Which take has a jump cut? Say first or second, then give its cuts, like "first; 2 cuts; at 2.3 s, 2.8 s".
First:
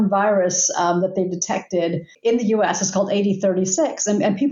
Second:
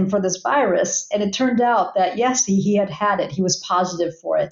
first; 1 cut; at 2.1 s